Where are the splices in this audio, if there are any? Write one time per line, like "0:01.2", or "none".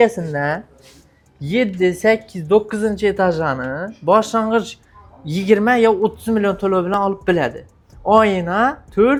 none